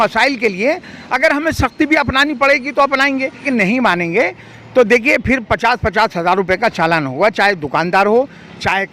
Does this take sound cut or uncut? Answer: cut